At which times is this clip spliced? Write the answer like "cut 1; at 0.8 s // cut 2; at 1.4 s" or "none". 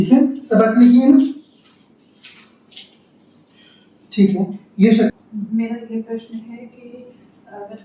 cut 1; at 5.1 s